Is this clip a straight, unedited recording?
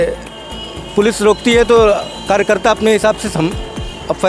yes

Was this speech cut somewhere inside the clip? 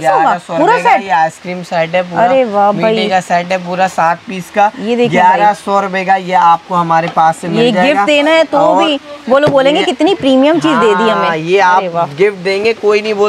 no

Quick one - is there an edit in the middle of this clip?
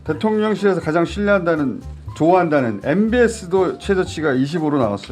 no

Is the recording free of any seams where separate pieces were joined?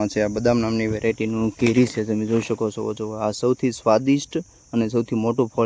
yes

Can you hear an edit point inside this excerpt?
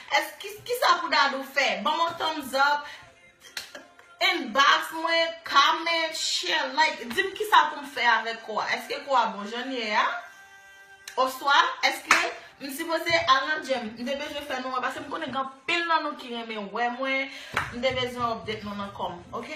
no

